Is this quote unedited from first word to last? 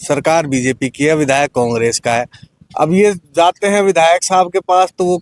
yes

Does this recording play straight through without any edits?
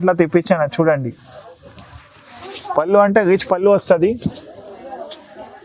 yes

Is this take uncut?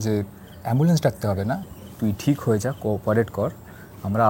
no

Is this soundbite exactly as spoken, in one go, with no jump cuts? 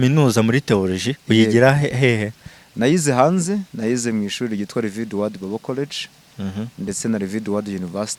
yes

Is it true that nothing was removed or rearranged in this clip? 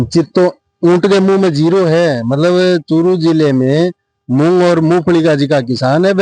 yes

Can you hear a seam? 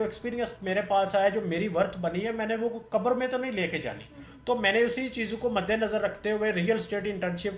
no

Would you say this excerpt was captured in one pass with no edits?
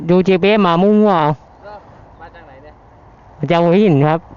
yes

